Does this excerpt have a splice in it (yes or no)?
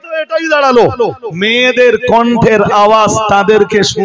no